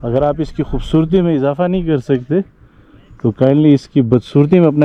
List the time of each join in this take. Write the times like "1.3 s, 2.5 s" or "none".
none

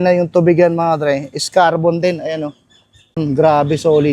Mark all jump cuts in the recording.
3.2 s

